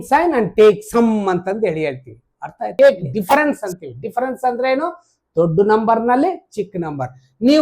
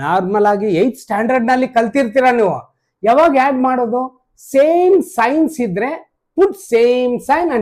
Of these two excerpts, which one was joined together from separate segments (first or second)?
first